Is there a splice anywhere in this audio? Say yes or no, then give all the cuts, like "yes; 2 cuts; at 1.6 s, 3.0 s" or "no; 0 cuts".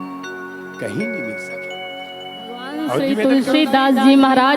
yes; 1 cut; at 3.0 s